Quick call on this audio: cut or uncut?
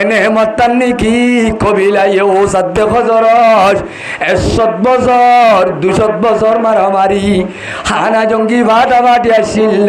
uncut